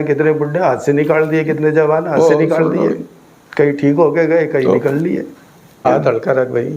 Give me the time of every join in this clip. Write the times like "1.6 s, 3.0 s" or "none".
5.6 s